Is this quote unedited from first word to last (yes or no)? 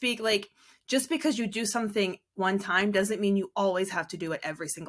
yes